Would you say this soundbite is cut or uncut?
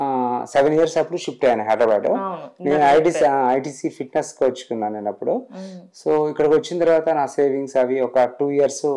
uncut